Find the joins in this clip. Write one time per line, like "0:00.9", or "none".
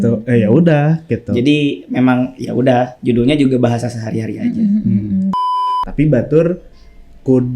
0:05.5